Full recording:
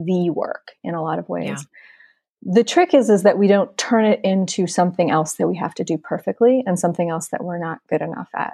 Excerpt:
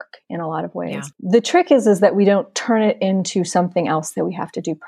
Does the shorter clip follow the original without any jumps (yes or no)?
no